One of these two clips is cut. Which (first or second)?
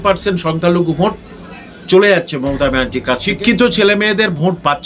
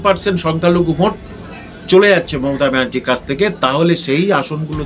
first